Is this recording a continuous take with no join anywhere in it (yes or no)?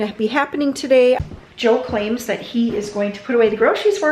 no